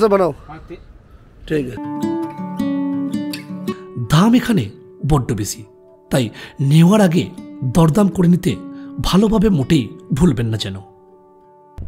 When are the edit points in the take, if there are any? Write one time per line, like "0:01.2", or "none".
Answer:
none